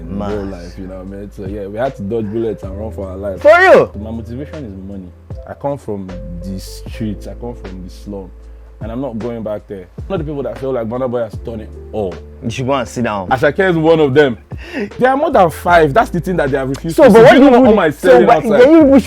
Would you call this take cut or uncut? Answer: cut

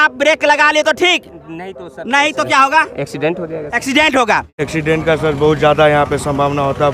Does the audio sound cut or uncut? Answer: cut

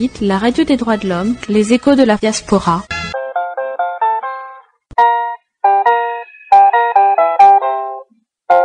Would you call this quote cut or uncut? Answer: uncut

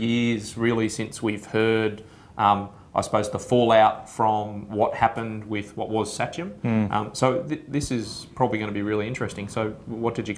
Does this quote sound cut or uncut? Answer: uncut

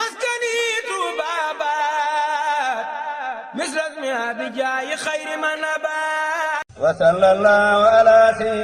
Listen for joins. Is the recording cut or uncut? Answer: cut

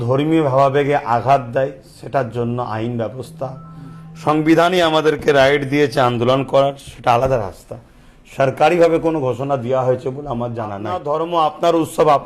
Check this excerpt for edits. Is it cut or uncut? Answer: cut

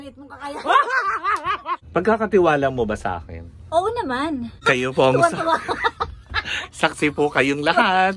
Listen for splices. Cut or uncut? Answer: cut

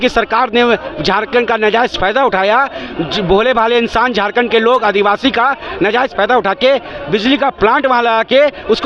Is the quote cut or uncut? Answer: uncut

